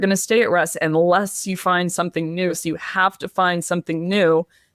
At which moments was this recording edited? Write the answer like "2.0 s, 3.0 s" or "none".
2.6 s